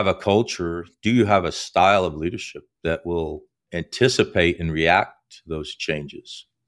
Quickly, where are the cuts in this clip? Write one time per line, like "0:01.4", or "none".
none

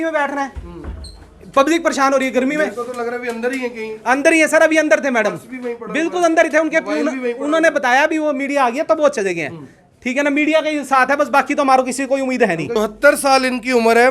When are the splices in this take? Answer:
0:12.7

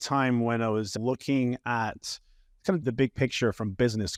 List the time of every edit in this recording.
none

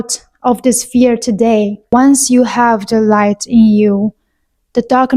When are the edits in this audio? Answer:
0:01.9

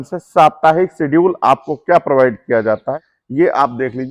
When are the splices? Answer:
0:03.0

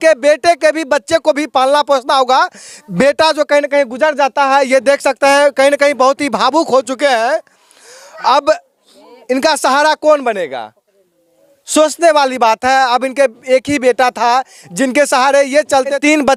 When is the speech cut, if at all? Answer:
none

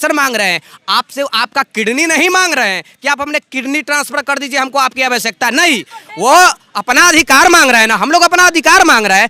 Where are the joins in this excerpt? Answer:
none

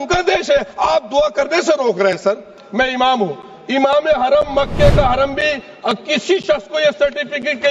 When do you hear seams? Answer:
0:02.6

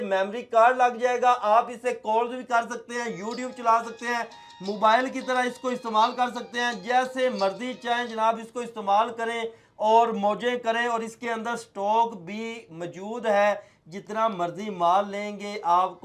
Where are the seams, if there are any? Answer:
none

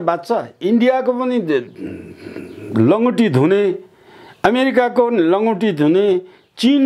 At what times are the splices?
none

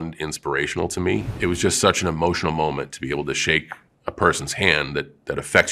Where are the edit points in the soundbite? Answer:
0:01.3

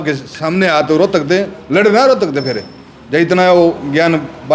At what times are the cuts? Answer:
none

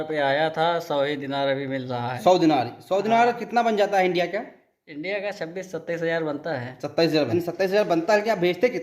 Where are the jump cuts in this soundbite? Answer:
0:07.3

